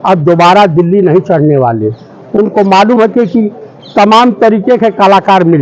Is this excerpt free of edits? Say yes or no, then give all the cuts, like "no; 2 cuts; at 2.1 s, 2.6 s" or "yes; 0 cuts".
yes; 0 cuts